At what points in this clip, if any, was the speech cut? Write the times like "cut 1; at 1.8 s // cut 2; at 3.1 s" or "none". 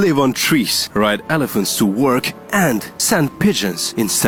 none